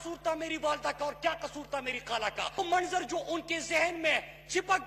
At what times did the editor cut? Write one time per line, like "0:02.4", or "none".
0:02.6